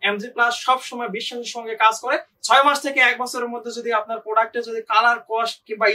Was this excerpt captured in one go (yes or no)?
no